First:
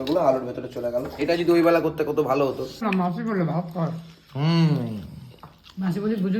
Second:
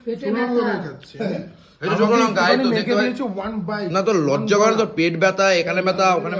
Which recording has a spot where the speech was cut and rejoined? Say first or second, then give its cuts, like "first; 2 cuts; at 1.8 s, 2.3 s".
first; 1 cut; at 2.8 s